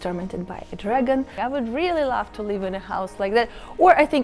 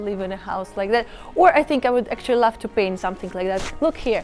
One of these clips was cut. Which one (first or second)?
first